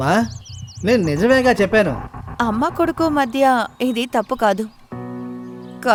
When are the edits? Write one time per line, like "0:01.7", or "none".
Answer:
none